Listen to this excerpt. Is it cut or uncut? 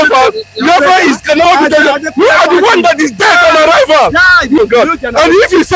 cut